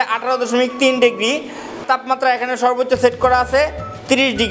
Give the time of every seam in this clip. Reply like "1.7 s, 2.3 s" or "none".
1.8 s